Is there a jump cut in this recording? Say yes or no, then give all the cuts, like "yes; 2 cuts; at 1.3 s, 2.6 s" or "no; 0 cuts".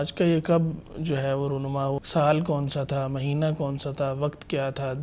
yes; 1 cut; at 2.0 s